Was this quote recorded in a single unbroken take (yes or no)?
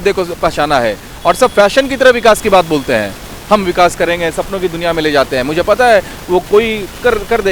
yes